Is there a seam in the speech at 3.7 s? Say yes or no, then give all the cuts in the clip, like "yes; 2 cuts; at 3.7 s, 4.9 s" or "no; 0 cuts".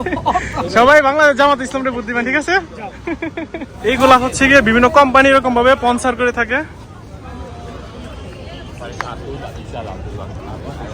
yes; 1 cut; at 3.7 s